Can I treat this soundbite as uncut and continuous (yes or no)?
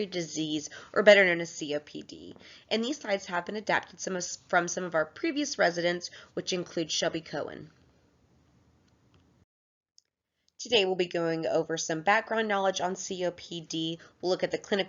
no